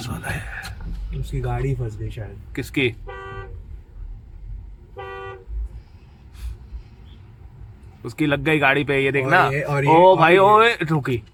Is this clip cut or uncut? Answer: uncut